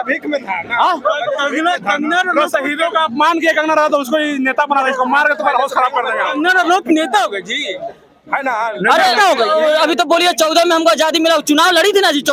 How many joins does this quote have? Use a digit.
0